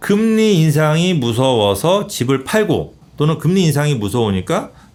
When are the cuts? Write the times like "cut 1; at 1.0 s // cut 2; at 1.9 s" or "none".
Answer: none